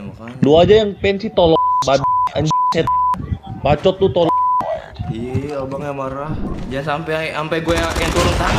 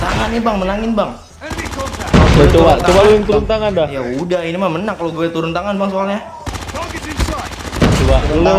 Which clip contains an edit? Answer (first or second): first